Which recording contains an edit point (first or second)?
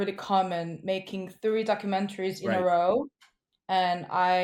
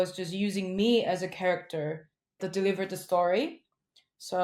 second